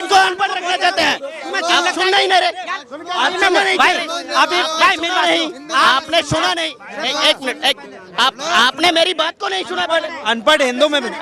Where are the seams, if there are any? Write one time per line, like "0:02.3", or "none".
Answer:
none